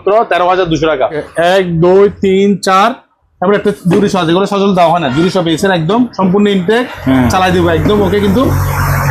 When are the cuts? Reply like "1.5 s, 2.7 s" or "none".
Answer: 1.2 s